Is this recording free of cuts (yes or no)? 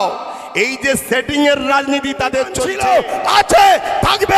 no